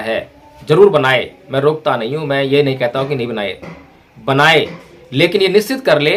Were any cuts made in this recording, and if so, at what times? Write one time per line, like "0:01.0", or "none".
none